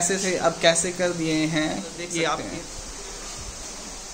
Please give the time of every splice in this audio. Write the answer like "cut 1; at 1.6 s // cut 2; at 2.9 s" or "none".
cut 1; at 2.4 s